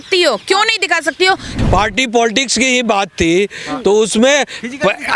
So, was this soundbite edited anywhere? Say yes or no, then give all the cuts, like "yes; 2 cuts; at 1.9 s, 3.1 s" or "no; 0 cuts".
yes; 1 cut; at 1.5 s